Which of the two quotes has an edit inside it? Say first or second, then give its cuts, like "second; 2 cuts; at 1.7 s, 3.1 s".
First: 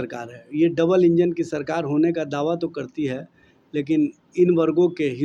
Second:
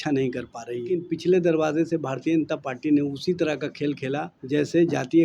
second; 2 cuts; at 0.9 s, 4.3 s